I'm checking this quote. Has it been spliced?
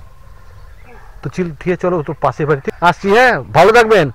yes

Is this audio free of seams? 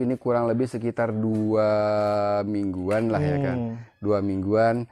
yes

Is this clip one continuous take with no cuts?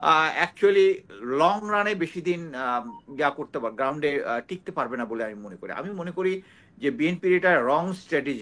yes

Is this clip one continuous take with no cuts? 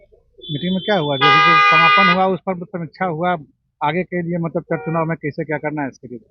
yes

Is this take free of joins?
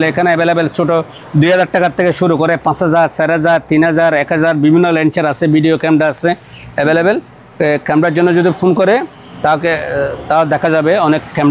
yes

